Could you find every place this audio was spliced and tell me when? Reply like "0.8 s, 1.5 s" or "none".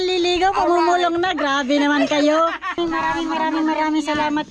2.8 s

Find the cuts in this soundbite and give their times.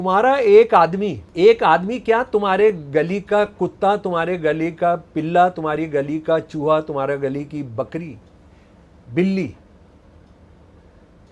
1.2 s

